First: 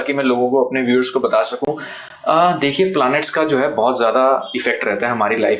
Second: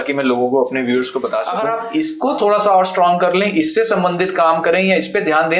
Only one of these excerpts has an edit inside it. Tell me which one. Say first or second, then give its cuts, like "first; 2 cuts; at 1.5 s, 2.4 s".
second; 1 cut; at 1.6 s